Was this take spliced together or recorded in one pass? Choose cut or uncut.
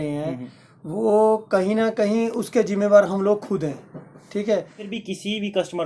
cut